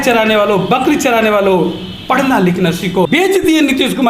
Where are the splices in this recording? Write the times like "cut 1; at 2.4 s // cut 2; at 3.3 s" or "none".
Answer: cut 1; at 3.1 s